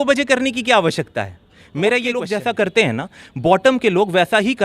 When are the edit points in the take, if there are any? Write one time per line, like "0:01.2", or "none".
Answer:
0:02.3

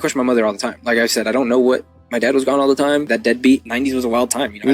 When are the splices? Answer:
0:00.8
0:03.1
0:03.7

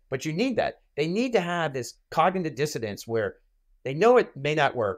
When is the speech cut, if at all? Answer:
none

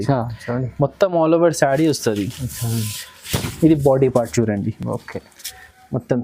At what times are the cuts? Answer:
none

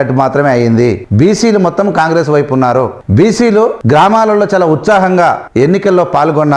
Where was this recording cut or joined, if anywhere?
0:01.0
0:03.0
0:03.8
0:05.4

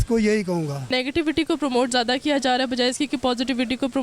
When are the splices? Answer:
0:00.9

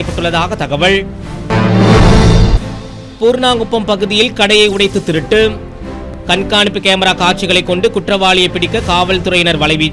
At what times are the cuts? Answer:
none

